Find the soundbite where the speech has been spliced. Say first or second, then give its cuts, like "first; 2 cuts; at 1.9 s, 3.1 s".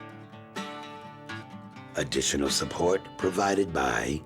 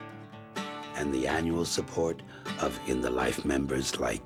first; 1 cut; at 0.9 s